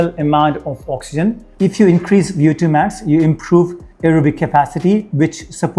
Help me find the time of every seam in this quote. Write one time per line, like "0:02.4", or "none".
0:01.5